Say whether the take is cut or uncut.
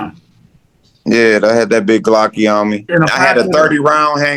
cut